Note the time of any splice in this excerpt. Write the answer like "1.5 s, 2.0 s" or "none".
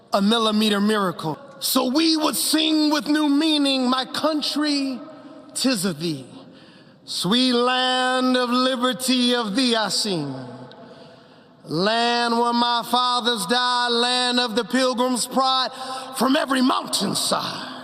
1.5 s